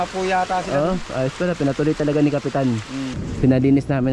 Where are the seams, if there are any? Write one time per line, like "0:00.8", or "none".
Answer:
0:03.2